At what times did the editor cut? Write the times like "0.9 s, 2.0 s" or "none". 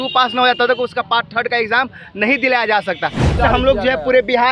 3.4 s

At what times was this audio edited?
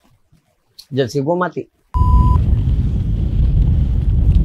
1.8 s

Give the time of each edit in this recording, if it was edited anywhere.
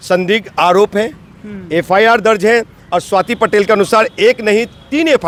none

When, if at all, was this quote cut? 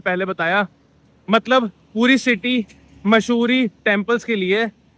none

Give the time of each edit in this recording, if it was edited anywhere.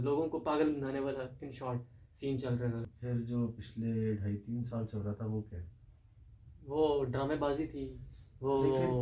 2.9 s

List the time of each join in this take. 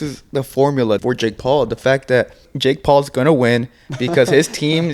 1.0 s, 2.4 s

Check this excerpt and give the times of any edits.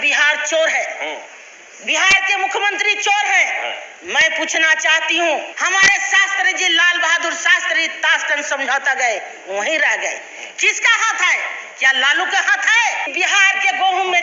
5.5 s, 13.1 s

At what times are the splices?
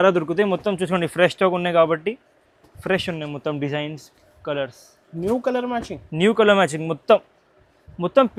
none

